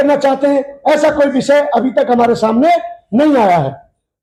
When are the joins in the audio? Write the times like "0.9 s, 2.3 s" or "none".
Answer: none